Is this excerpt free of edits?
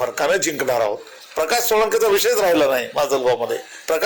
yes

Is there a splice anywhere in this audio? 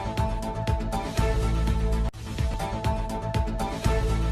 no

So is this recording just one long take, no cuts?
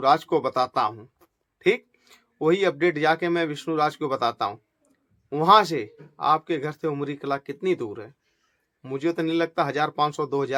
yes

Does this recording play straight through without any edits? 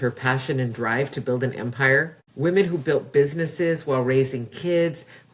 no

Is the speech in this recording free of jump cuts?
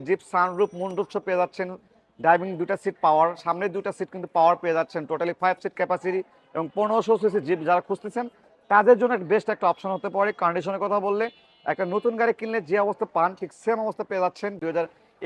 yes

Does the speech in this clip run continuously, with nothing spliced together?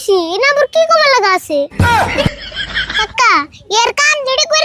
no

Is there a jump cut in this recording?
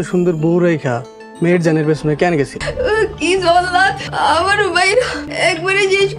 yes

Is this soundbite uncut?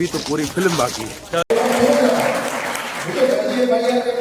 no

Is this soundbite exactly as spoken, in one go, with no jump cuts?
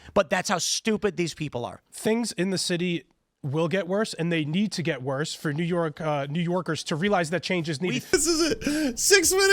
no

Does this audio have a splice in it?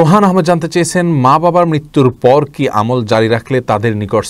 no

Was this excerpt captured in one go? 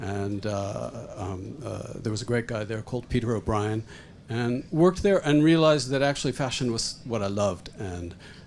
yes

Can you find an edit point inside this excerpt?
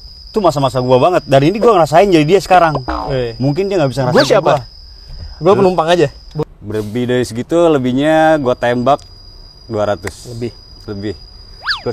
yes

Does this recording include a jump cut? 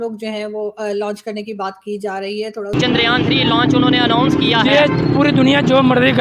yes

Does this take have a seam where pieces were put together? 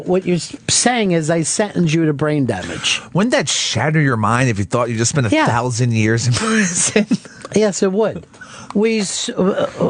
yes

